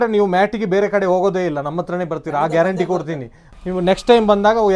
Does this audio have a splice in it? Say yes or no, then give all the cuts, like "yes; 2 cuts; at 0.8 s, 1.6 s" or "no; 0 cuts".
yes; 1 cut; at 3.4 s